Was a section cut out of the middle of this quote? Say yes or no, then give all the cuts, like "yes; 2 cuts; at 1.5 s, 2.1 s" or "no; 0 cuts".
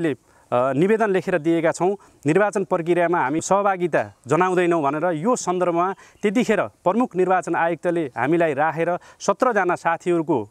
yes; 1 cut; at 3.4 s